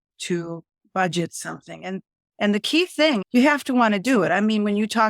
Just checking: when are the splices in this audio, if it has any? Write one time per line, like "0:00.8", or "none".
0:03.2